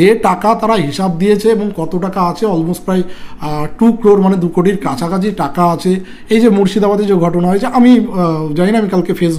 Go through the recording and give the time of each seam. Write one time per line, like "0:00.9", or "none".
none